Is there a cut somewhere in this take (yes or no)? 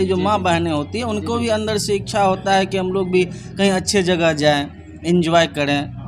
no